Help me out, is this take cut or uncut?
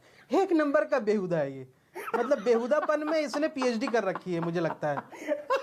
uncut